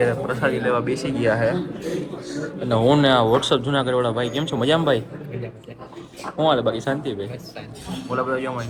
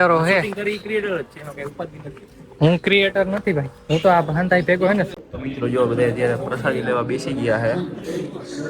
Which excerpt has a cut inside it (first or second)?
second